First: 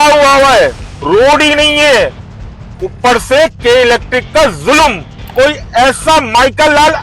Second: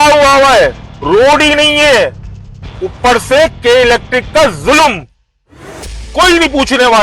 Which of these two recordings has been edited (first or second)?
first